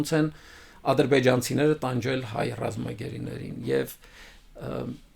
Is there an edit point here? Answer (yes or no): no